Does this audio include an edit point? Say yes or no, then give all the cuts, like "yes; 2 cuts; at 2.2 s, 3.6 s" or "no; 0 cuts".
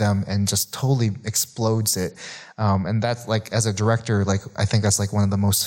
no; 0 cuts